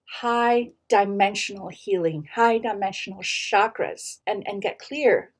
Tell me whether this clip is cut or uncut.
cut